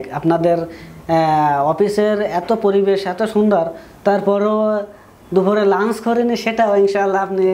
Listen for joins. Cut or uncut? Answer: uncut